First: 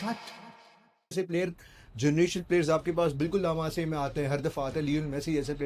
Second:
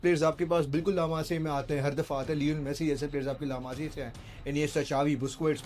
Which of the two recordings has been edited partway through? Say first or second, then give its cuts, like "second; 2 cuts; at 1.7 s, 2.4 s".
first; 1 cut; at 1.1 s